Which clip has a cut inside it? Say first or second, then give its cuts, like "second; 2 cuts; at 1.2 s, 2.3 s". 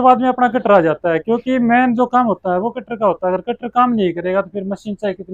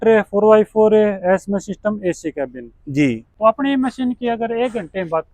second; 1 cut; at 3.3 s